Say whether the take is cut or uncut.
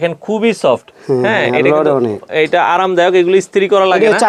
uncut